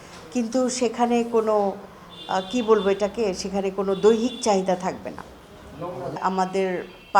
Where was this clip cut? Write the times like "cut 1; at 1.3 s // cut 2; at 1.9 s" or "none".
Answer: cut 1; at 6.2 s

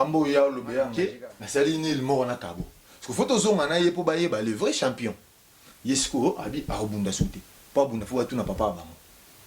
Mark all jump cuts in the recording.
cut 1; at 0.9 s

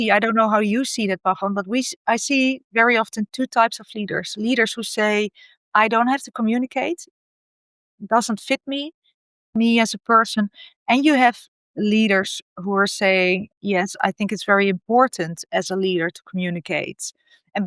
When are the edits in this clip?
none

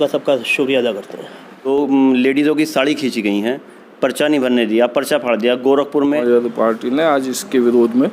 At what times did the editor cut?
cut 1; at 1.7 s // cut 2; at 6.2 s

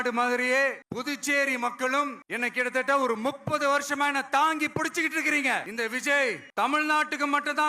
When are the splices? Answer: cut 1; at 0.9 s // cut 2; at 2.2 s // cut 3; at 6.2 s

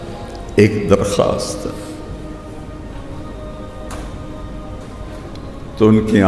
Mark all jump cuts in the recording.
none

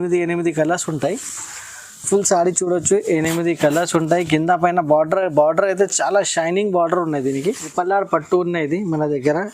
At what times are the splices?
cut 1; at 7.7 s

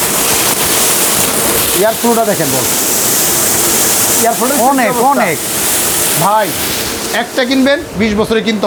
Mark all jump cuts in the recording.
none

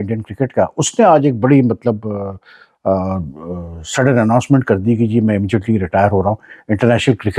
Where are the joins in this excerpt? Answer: none

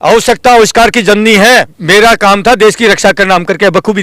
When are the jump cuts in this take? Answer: cut 1; at 1.8 s

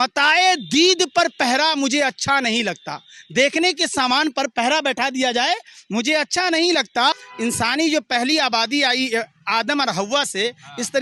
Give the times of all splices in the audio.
cut 1; at 7.3 s

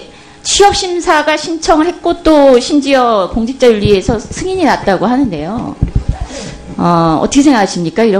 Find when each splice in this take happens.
none

